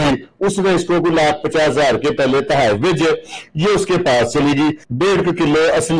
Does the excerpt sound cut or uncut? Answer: cut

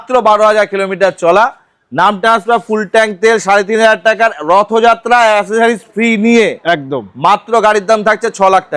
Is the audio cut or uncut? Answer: uncut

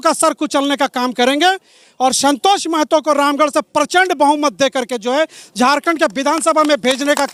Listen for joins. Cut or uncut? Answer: uncut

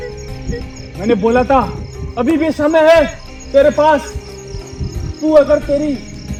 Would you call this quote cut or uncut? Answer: uncut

